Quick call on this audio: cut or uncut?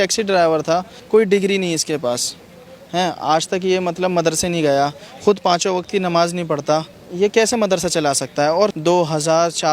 cut